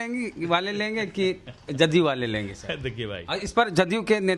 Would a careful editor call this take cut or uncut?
uncut